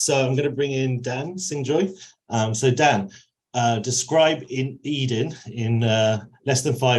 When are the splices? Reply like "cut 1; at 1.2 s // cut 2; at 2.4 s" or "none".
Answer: none